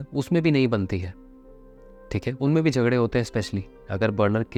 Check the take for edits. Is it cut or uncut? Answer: uncut